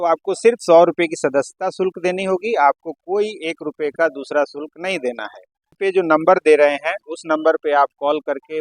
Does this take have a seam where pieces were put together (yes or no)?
yes